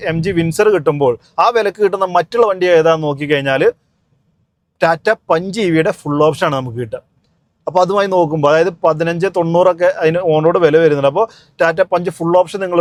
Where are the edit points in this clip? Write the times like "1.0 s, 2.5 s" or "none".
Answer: none